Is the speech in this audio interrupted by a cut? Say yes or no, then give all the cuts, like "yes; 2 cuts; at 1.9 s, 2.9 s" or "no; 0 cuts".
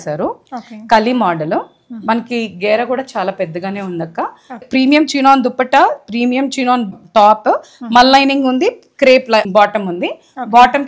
yes; 3 cuts; at 4.6 s, 6.9 s, 9.4 s